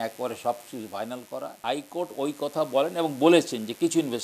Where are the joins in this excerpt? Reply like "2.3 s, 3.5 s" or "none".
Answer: 1.6 s